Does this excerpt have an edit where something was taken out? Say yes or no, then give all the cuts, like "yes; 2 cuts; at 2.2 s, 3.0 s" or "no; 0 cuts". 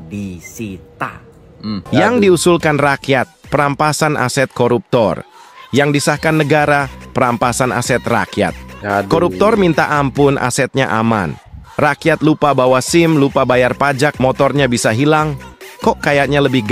yes; 1 cut; at 1.9 s